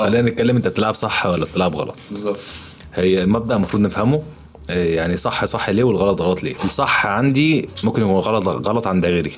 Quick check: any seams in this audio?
no; 0 cuts

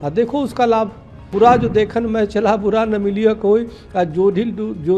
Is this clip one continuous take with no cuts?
no; 1 cut; at 1.3 s

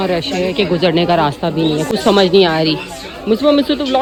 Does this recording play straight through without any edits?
yes; 0 cuts

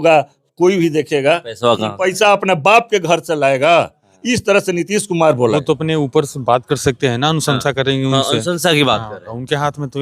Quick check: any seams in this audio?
yes; 1 cut; at 5.5 s

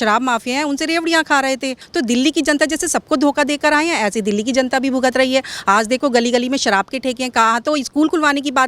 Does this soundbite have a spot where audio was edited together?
yes; 1 cut; at 1.8 s

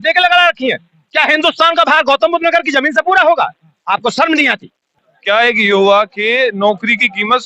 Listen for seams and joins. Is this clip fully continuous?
no; 1 cut; at 4.9 s

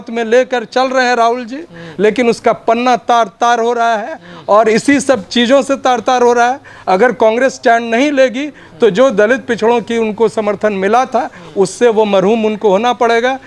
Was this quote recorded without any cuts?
yes; 0 cuts

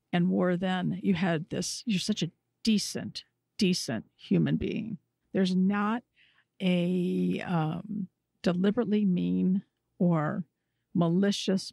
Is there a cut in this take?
no; 0 cuts

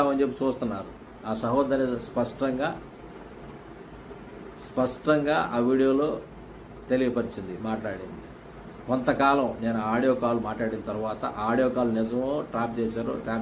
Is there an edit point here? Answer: no; 0 cuts

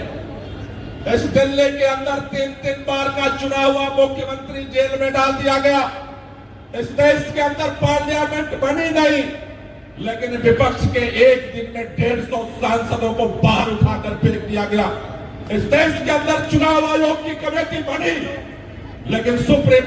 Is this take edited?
no; 0 cuts

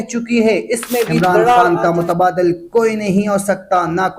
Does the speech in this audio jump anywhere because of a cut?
yes; 1 cut; at 1.7 s

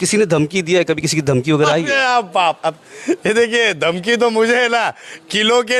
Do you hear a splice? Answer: no; 0 cuts

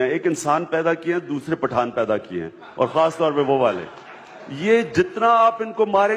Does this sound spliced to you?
no; 0 cuts

